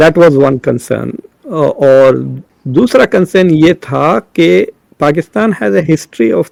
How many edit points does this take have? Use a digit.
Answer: 0